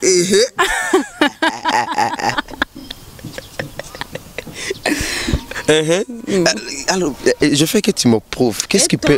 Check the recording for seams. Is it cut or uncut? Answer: uncut